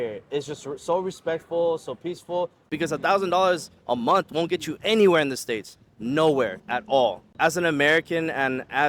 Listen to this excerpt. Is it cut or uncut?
cut